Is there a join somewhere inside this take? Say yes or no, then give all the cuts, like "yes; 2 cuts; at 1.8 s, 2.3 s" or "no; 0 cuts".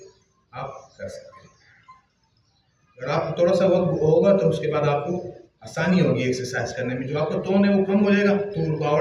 no; 0 cuts